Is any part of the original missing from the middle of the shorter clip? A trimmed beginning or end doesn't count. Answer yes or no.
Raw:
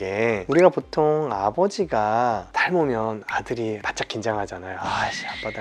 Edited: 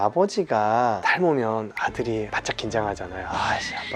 yes